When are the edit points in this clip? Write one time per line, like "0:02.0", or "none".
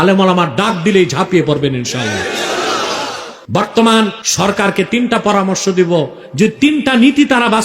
0:03.3
0:04.2